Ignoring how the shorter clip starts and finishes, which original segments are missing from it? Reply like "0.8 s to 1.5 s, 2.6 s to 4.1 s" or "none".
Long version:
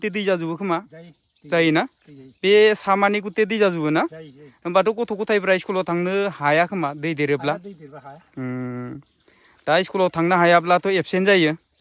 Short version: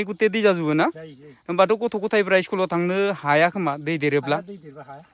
none